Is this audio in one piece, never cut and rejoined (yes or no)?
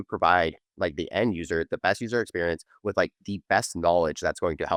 yes